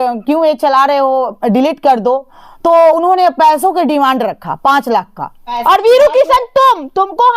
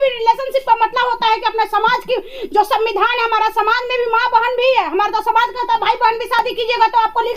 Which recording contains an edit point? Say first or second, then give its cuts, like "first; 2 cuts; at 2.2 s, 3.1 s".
first; 1 cut; at 5.6 s